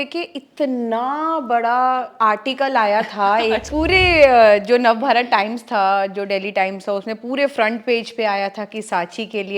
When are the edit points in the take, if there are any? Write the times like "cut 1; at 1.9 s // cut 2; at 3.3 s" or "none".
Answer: cut 1; at 3.6 s